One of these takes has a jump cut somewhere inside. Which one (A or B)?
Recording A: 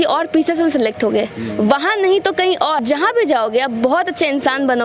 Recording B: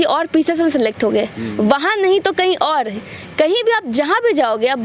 A